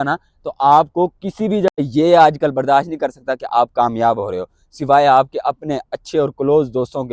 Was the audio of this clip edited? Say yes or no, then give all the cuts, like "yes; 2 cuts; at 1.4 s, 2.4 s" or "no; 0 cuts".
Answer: yes; 1 cut; at 1.8 s